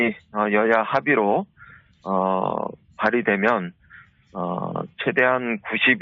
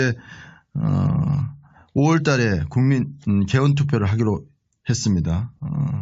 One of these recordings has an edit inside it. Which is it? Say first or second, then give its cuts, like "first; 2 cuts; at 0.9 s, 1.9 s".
first; 1 cut; at 3.2 s